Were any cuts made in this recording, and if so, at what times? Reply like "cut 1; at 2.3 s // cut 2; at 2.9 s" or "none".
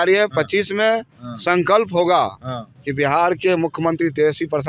none